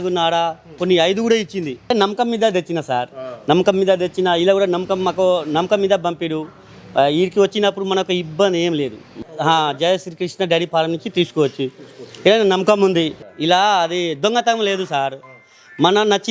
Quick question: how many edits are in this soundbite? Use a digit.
3